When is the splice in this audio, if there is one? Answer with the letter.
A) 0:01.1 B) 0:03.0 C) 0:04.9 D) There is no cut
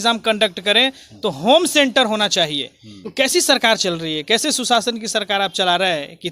B